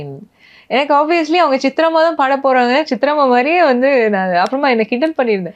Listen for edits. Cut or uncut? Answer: uncut